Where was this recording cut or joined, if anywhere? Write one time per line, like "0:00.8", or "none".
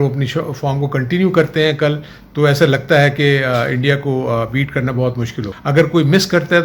0:05.5